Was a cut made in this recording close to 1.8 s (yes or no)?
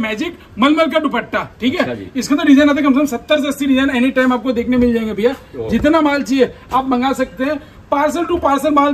no